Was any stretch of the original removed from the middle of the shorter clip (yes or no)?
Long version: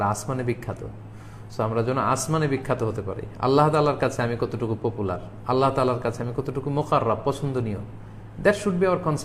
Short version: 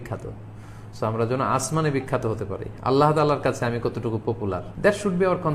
yes